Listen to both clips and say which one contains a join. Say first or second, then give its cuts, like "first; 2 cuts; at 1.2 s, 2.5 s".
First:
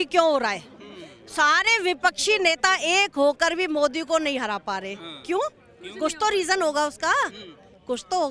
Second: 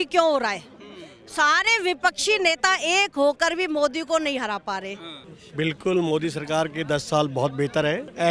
second; 1 cut; at 5.2 s